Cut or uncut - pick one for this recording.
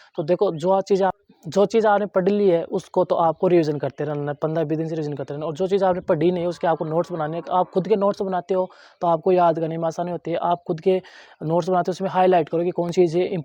uncut